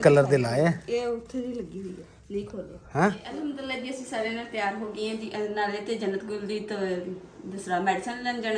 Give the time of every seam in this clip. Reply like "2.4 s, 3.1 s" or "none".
3.3 s